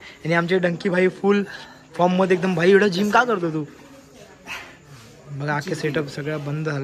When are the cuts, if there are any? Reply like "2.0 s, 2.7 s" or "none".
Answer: none